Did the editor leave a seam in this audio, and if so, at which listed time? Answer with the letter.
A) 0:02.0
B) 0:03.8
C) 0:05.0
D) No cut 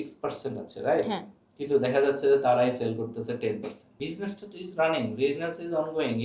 B